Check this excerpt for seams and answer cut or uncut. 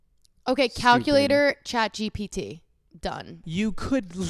cut